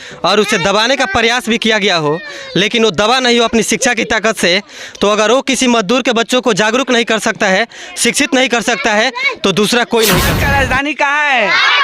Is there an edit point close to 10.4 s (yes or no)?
yes